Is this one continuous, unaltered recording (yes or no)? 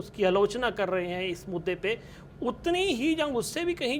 yes